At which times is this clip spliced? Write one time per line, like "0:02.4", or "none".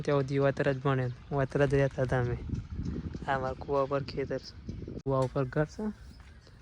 0:05.1